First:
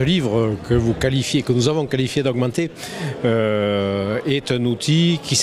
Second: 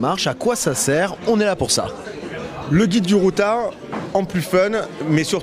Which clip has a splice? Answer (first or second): second